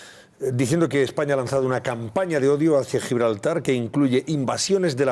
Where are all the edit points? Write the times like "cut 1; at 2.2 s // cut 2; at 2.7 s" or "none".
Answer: cut 1; at 3.8 s